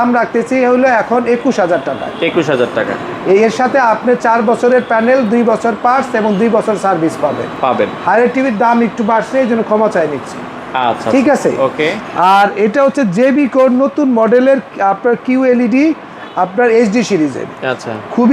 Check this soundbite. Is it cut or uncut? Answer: uncut